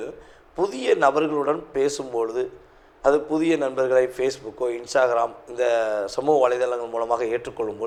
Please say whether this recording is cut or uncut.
uncut